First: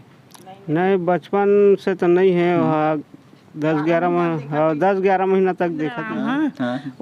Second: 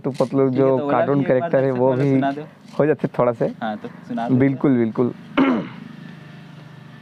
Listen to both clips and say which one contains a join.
first; 1 cut; at 6.0 s

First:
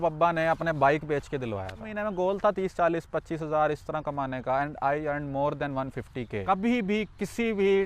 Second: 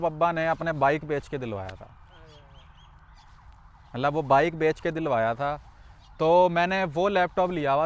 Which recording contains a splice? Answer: first; 2 cuts; at 1.9 s, 6.4 s

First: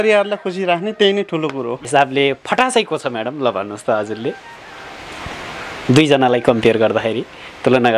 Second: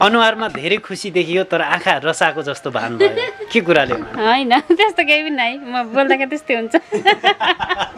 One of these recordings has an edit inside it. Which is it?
first; 1 cut; at 1.9 s

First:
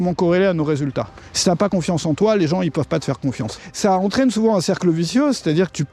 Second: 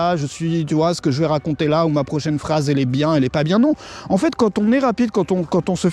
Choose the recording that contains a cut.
first; 2 cuts; at 1.2 s, 3.6 s

